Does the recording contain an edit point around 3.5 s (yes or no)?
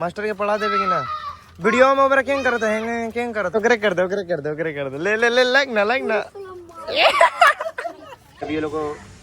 yes